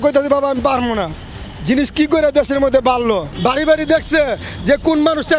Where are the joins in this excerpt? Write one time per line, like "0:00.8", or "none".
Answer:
0:03.3